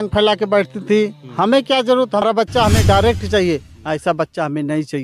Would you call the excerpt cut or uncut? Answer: cut